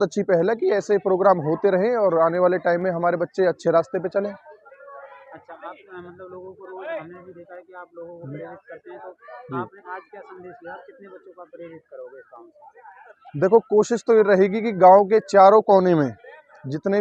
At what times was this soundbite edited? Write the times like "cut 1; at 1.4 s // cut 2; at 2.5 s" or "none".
none